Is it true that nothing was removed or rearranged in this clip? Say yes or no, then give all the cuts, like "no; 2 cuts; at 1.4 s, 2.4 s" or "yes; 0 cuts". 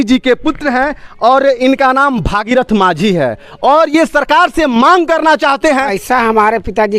no; 1 cut; at 6.0 s